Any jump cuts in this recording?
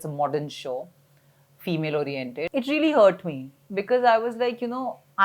yes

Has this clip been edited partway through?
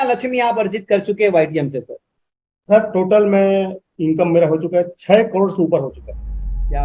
no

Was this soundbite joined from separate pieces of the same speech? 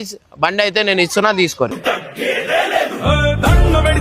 no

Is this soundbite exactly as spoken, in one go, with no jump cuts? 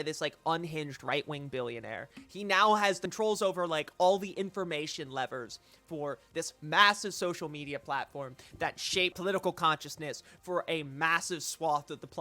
no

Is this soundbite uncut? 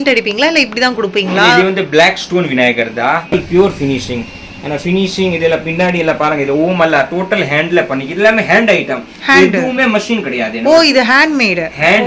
no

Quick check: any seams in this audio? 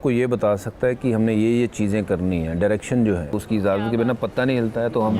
yes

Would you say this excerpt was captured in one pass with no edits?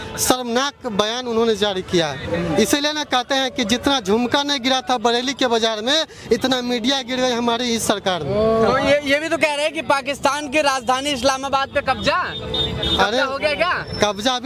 yes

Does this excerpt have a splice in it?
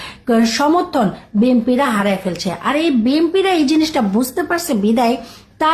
no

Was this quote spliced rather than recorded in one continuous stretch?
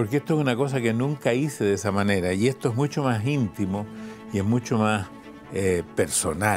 no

